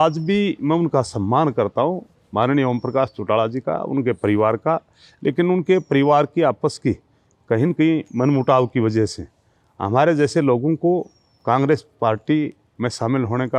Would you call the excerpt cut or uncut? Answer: uncut